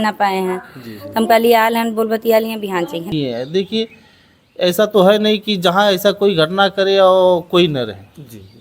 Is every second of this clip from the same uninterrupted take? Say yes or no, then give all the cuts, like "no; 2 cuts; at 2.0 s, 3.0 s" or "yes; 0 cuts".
no; 1 cut; at 3.1 s